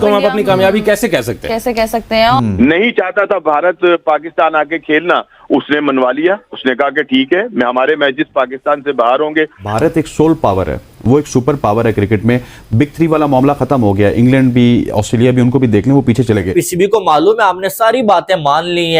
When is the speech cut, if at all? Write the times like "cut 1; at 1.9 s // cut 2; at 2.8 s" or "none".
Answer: cut 1; at 2.4 s // cut 2; at 9.7 s // cut 3; at 16.5 s